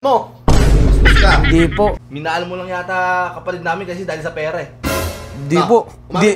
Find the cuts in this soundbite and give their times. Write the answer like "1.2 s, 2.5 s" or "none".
2.0 s